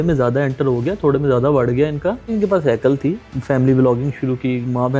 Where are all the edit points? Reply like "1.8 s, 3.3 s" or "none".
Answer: none

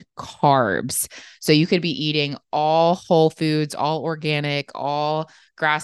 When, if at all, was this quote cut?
1.2 s

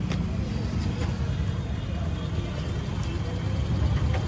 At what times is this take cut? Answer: none

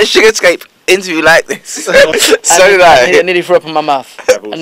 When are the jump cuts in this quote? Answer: 2.1 s

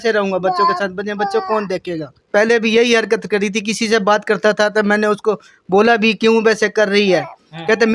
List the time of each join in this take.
2.2 s

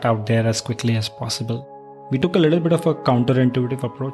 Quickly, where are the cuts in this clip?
2.1 s

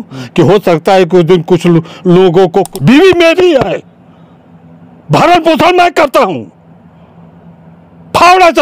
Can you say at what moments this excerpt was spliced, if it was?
2.7 s

